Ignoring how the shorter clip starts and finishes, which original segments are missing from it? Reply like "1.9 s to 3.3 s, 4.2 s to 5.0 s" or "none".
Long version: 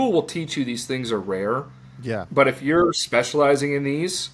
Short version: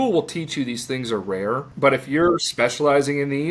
1.7 s to 2.3 s